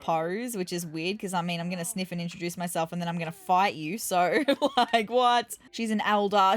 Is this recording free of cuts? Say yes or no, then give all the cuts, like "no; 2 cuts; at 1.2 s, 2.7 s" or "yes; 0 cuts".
no; 1 cut; at 5.6 s